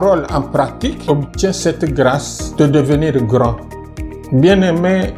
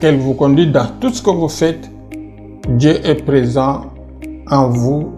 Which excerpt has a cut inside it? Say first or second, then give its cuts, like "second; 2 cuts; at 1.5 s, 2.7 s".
first; 3 cuts; at 1.0 s, 2.4 s, 3.7 s